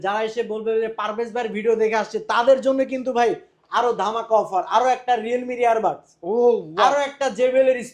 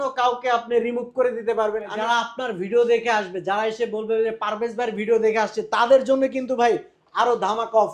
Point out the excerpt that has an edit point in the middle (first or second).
second